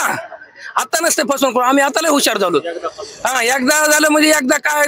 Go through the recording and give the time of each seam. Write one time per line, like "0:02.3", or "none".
none

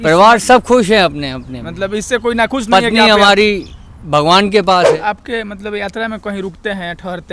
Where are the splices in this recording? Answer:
0:05.0

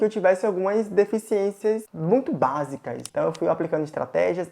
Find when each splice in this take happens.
0:03.0

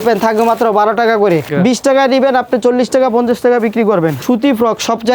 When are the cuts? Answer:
0:01.5
0:04.2

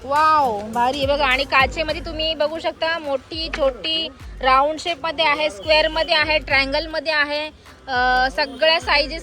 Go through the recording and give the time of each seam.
none

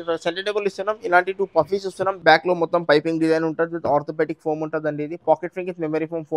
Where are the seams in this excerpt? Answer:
0:02.2

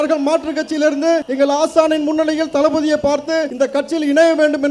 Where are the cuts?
0:01.3
0:03.5

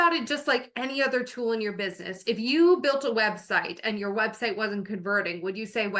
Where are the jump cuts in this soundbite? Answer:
none

